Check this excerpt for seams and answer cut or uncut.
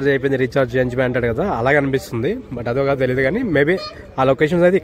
uncut